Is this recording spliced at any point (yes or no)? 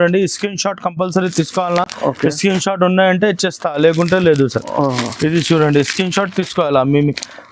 no